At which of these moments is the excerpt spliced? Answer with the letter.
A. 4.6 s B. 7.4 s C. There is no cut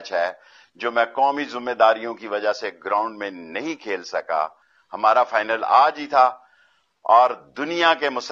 A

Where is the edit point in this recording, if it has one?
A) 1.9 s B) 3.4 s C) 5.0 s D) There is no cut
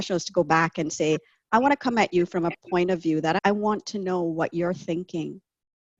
B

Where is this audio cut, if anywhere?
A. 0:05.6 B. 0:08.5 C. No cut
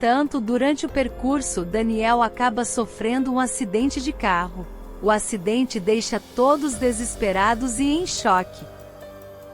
B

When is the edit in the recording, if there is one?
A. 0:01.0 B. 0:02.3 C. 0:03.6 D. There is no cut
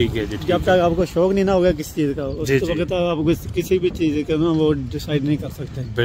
D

